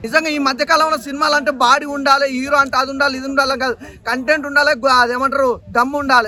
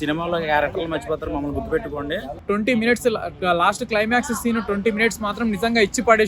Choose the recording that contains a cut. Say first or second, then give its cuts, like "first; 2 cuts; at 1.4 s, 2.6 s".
second; 1 cut; at 2.3 s